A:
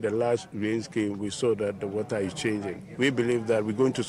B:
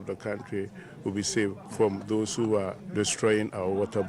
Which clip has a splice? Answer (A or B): B